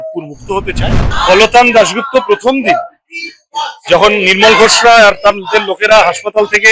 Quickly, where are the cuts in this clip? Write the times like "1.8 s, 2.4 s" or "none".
1.1 s